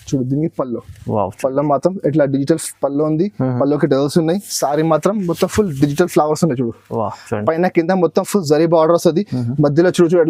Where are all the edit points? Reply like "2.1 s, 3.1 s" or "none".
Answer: none

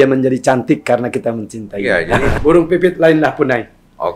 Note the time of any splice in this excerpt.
2.4 s

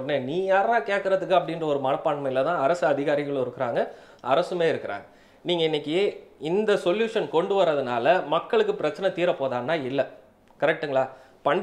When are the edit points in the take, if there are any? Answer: none

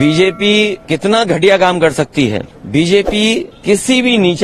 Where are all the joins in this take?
0.8 s, 2.6 s, 3.5 s

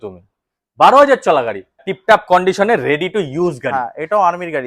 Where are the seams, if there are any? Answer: 1.9 s

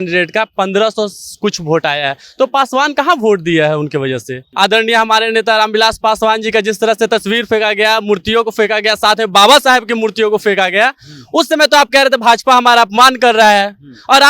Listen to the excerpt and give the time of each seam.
4.4 s

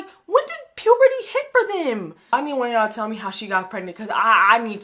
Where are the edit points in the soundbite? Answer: 2.3 s

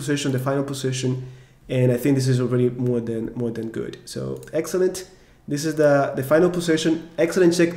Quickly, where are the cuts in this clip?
none

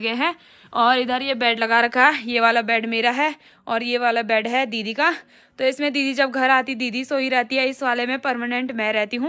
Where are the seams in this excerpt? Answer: none

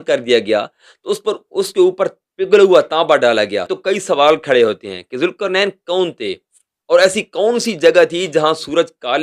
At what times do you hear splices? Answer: 3.8 s

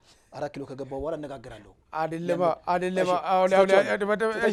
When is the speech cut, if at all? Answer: none

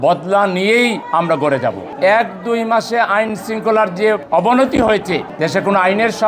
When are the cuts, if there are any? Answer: 1.9 s, 4.2 s, 5.3 s

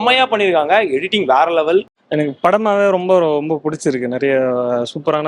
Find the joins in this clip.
2.0 s

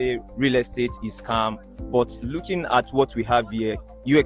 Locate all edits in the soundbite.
3.4 s

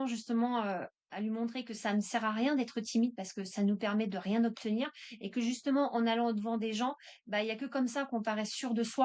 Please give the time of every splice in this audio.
none

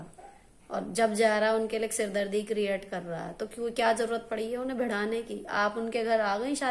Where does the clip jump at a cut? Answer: none

